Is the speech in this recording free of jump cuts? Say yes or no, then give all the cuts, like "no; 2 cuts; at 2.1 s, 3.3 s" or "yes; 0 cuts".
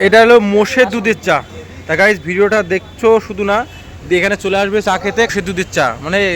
no; 1 cut; at 5.3 s